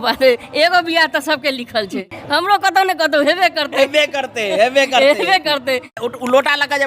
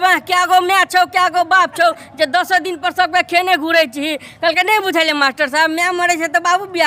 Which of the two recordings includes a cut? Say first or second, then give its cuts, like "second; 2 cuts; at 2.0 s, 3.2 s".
first; 2 cuts; at 2.0 s, 6.0 s